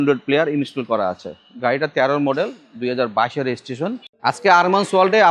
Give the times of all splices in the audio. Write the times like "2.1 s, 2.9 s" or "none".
4.1 s